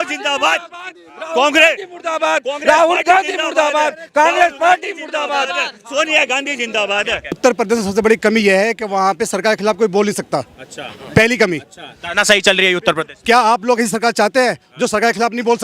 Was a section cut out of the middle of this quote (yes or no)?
yes